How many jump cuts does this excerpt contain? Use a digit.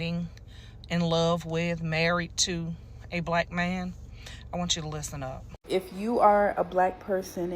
1